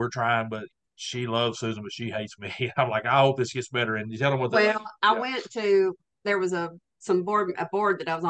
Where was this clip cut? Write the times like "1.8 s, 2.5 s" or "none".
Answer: none

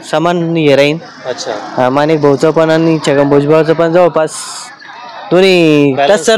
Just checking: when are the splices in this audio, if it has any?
none

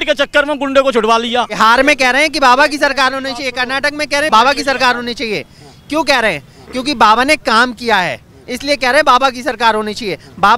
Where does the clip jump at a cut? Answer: 1.6 s, 4.3 s

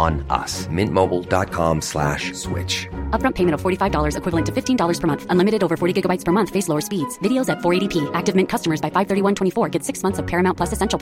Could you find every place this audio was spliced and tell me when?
none

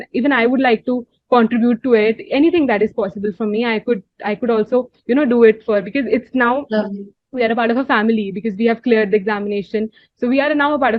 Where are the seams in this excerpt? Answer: none

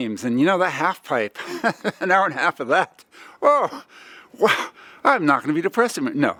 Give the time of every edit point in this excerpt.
none

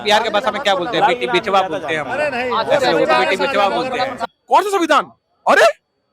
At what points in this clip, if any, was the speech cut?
4.2 s

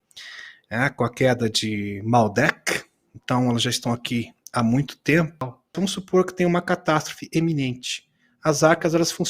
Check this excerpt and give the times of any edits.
5.6 s

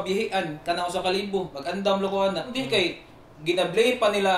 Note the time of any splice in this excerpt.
1.6 s, 2.5 s

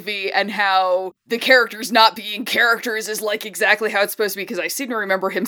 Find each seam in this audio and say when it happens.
1.2 s

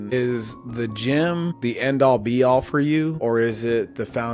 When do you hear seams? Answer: none

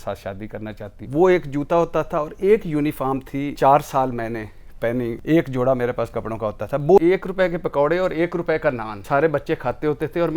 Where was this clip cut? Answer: 1.0 s, 3.5 s, 5.2 s, 7.0 s, 8.9 s

